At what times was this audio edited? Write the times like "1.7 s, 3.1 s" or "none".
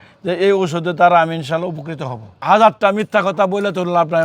2.3 s